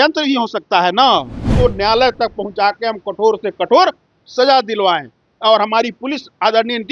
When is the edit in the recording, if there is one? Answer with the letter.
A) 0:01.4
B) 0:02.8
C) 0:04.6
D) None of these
A